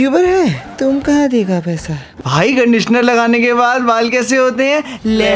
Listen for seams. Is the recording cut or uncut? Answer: cut